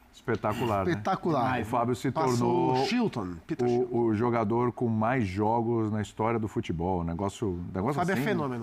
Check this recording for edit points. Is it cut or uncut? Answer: uncut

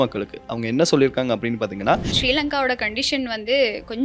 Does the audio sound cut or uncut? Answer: cut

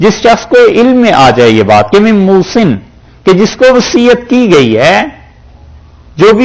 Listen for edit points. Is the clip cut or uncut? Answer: uncut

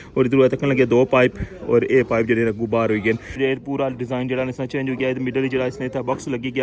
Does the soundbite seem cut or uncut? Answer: cut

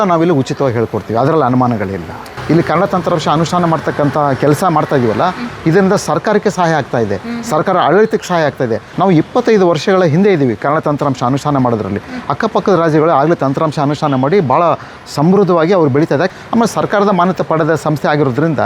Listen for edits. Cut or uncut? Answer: cut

